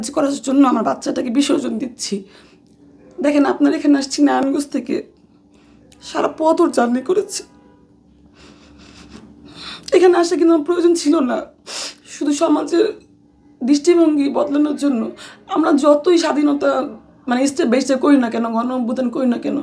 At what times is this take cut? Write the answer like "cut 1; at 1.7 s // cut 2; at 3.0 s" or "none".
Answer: none